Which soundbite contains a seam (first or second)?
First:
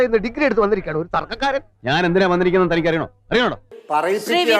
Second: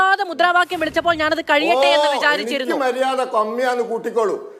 first